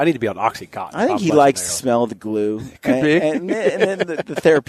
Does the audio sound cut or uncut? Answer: uncut